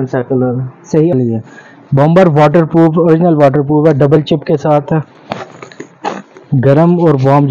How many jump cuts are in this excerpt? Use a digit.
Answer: 1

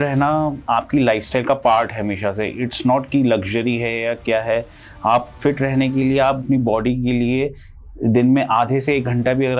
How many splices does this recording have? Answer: 0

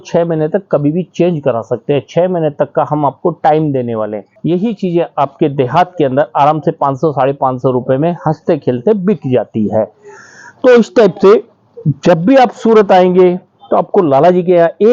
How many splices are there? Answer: 1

